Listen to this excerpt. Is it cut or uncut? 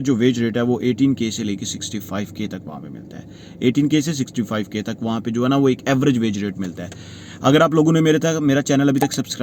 uncut